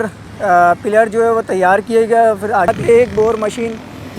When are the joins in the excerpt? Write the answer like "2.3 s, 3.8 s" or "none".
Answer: 2.7 s

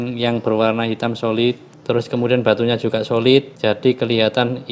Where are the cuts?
1.7 s, 3.5 s

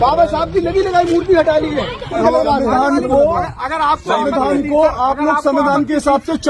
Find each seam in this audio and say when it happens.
2.2 s

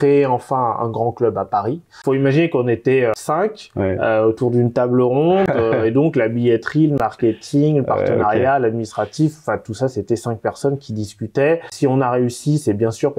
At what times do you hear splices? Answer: 1.9 s, 3.2 s, 11.7 s

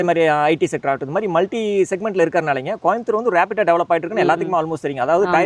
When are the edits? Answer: none

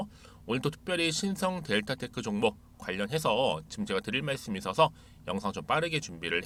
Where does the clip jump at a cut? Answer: none

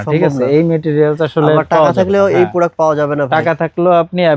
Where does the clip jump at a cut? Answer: none

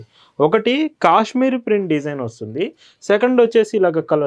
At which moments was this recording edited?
none

